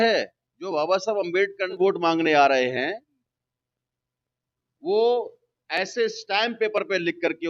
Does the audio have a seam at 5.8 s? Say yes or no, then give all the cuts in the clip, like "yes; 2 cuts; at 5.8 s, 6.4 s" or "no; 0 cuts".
no; 1 cut; at 1.8 s